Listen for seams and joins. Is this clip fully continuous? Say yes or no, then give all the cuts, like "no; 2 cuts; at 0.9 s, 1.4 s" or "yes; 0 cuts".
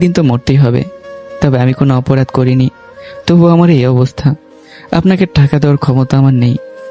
yes; 0 cuts